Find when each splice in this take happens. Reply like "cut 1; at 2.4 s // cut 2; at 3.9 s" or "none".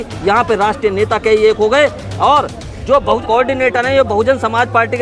cut 1; at 3.2 s

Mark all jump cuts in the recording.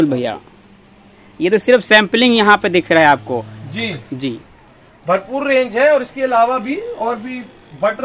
none

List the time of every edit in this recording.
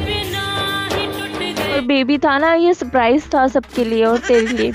cut 1; at 1.8 s

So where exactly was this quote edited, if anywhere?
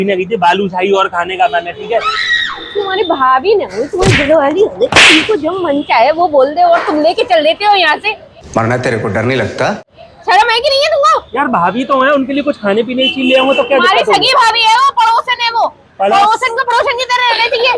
none

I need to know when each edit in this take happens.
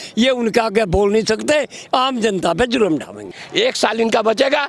cut 1; at 3.4 s

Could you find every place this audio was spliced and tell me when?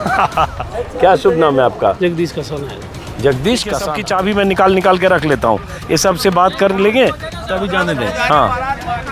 cut 1; at 3.9 s

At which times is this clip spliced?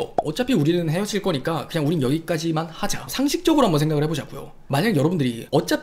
cut 1; at 3.1 s

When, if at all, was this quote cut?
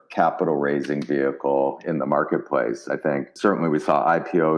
cut 1; at 3.3 s

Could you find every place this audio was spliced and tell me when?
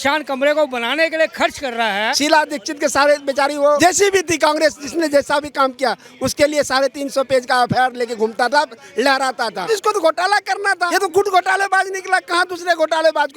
cut 1; at 2.1 s // cut 2; at 3.8 s // cut 3; at 9.6 s // cut 4; at 10.9 s

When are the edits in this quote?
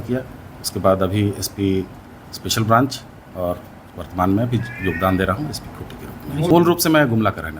cut 1; at 6.5 s

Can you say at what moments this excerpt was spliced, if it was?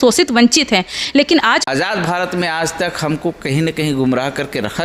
cut 1; at 1.6 s

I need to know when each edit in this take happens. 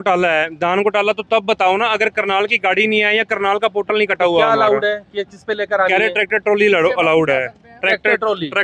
none

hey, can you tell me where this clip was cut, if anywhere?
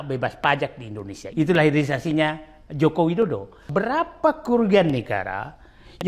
cut 1; at 1.3 s // cut 2; at 3.6 s

